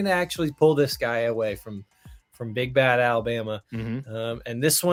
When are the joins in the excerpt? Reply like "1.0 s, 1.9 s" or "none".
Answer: none